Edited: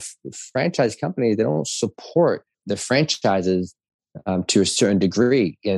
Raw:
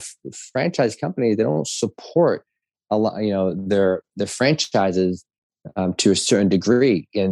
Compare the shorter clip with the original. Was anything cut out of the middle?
yes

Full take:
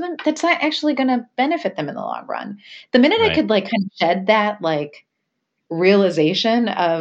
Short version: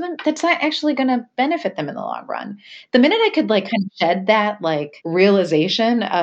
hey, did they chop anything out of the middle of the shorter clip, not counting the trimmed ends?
yes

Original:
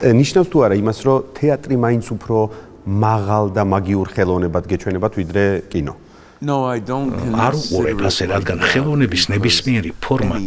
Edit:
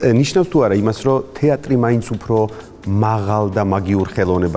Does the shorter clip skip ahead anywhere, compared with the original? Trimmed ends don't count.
no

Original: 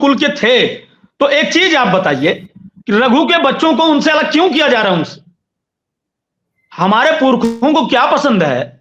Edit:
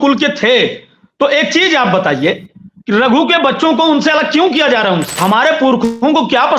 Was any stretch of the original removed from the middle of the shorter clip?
yes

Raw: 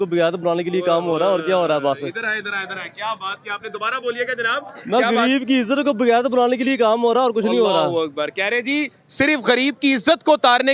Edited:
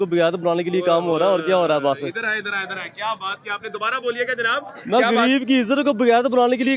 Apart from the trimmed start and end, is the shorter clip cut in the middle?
no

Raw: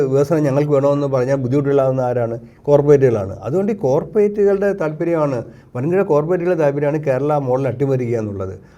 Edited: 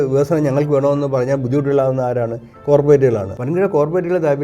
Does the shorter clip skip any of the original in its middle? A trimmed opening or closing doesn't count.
yes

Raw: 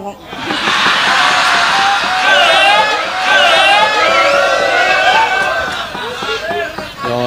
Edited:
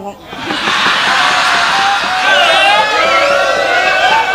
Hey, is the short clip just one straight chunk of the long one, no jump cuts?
no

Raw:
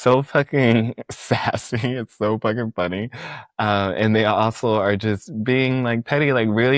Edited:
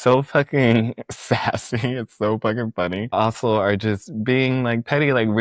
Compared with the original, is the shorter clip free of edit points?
no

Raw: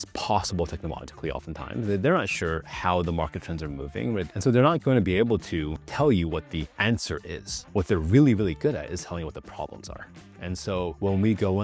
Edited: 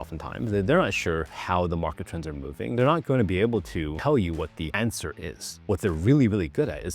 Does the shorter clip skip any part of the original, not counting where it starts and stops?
yes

